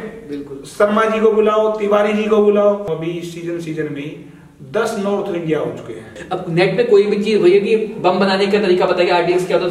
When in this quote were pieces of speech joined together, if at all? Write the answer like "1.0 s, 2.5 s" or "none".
2.9 s, 6.0 s